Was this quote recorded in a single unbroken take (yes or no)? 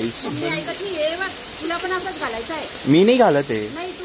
yes